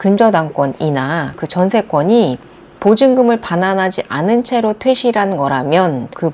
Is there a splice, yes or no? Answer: no